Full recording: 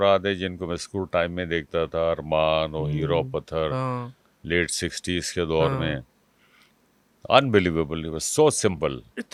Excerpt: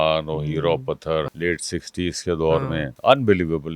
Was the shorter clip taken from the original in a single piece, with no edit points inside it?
no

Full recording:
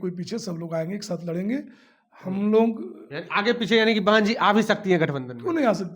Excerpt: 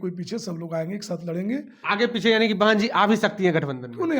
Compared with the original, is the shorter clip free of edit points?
no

